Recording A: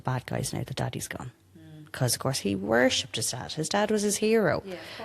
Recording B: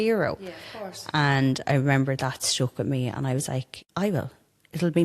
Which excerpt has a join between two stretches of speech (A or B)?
B